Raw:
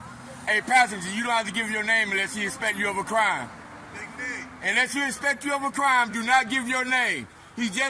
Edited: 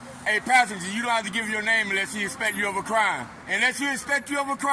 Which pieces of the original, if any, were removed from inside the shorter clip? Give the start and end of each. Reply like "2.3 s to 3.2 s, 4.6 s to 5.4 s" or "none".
3.6 s to 4.5 s